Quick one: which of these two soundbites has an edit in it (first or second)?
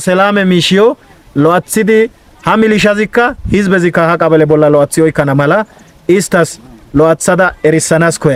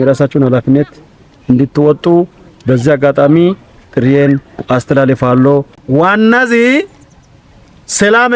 second